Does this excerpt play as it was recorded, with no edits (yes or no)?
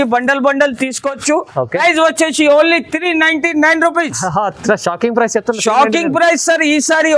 no